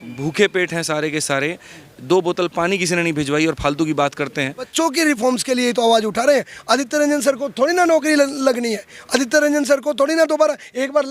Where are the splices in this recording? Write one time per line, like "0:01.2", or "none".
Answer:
0:04.7